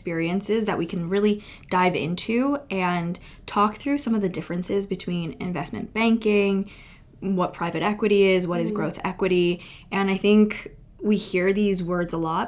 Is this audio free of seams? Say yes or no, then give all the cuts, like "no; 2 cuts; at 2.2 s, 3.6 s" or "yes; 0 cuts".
yes; 0 cuts